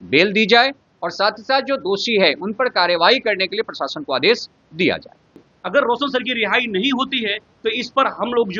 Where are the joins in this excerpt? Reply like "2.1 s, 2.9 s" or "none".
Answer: 5.4 s

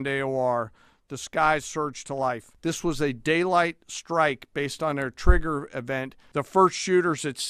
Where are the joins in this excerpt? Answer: 2.5 s, 6.2 s

